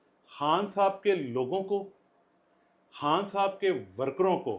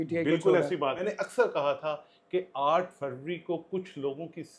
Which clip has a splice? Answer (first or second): second